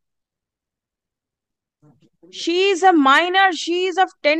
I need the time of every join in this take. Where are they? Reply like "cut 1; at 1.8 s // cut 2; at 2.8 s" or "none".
none